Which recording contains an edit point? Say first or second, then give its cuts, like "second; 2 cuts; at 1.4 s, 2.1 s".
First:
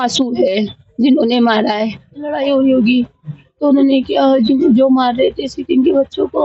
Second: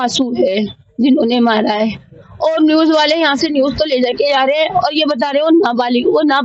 first; 1 cut; at 2.3 s